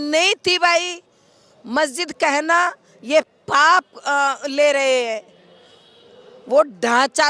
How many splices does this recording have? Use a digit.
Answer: 0